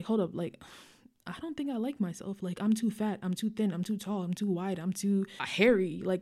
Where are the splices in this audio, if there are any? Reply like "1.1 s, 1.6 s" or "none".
none